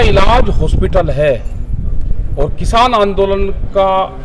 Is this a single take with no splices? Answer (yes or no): yes